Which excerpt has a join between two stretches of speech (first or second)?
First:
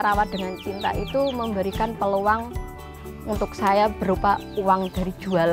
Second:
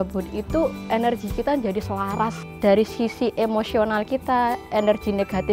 second